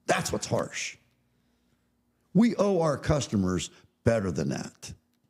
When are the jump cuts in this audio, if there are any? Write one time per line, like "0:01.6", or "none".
none